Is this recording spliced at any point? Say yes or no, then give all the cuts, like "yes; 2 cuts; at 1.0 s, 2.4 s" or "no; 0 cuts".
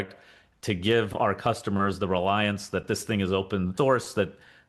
yes; 1 cut; at 3.7 s